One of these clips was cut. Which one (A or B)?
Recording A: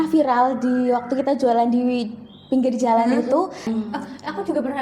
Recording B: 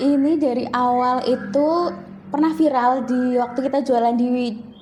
A